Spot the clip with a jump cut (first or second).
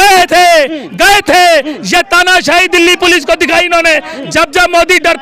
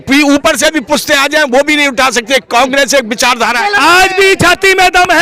second